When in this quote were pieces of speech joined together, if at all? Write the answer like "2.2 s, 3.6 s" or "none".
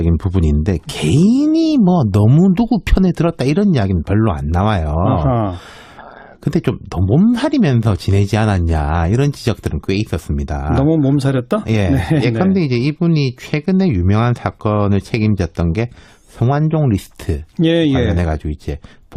none